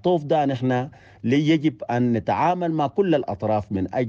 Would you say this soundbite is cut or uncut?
uncut